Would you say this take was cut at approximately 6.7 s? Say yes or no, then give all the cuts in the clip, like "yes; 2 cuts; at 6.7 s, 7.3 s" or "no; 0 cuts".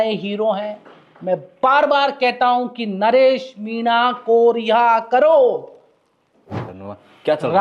yes; 1 cut; at 6.7 s